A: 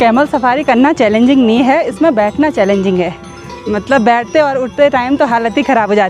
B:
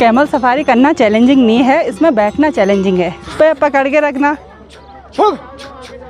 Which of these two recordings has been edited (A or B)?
B